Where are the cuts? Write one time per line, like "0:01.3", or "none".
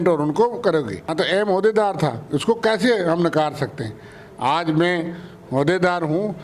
0:01.1